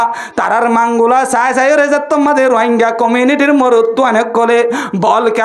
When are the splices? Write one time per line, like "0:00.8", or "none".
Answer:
none